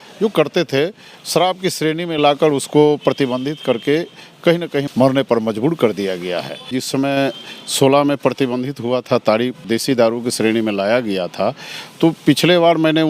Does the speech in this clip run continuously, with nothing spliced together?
no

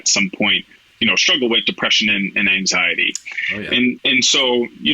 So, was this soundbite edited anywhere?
yes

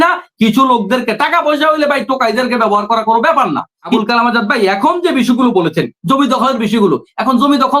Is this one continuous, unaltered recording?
no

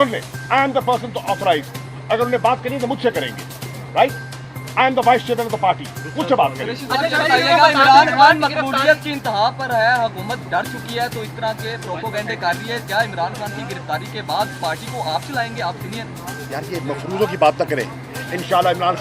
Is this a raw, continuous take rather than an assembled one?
yes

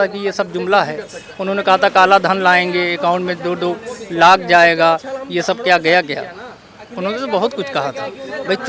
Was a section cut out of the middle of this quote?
no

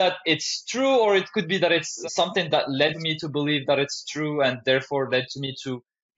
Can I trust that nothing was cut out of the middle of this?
no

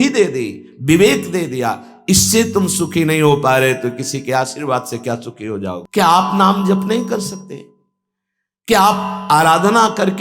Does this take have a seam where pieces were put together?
yes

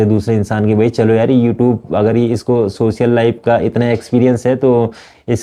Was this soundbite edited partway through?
no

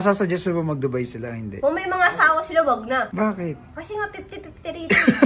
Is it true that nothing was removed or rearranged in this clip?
yes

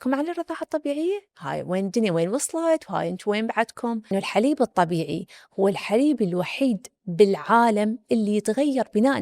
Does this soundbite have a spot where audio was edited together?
yes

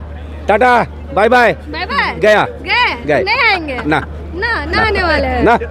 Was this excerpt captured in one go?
yes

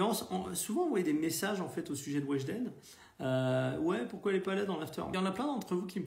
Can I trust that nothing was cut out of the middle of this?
no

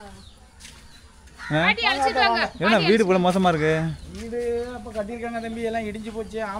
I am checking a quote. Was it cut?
no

